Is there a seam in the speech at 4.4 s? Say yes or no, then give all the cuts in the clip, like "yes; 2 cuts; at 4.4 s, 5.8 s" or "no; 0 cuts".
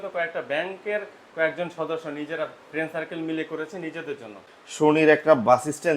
yes; 1 cut; at 4.4 s